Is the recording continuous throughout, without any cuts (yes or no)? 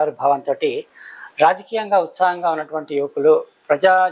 yes